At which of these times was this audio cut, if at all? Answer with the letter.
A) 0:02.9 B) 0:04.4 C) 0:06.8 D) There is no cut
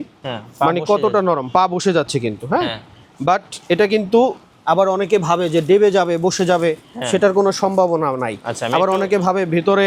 D